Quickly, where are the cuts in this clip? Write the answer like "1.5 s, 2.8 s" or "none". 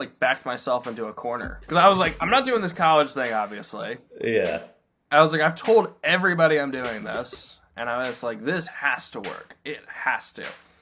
1.5 s